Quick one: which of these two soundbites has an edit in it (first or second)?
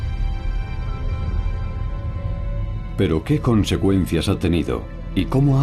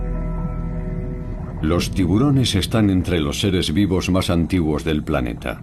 first